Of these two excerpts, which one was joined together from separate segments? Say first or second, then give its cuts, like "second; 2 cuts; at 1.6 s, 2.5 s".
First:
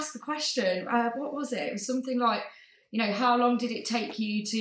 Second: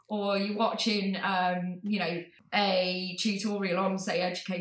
second; 1 cut; at 2.3 s